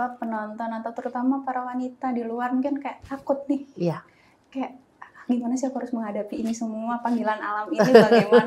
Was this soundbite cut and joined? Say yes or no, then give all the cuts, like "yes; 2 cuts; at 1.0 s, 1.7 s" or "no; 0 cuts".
no; 0 cuts